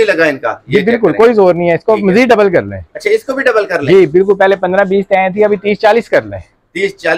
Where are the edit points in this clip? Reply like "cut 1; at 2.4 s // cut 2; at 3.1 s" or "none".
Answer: none

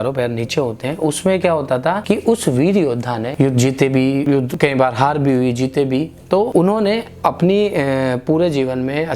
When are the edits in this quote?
cut 1; at 2.0 s // cut 2; at 3.3 s // cut 3; at 4.3 s // cut 4; at 6.5 s

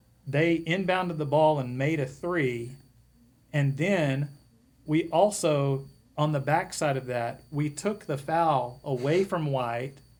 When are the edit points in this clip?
none

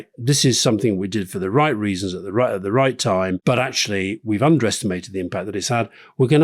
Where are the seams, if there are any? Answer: cut 1; at 3.4 s

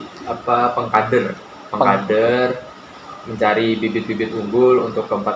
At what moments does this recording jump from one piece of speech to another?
none

